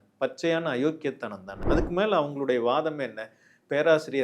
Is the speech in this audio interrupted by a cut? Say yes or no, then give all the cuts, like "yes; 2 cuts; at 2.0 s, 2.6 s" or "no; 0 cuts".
yes; 1 cut; at 1.6 s